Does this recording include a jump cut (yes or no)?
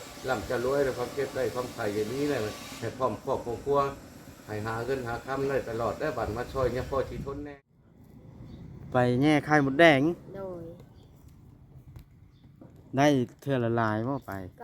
yes